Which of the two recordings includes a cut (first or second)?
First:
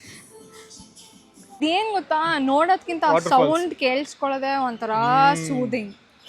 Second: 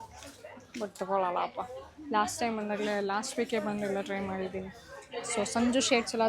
first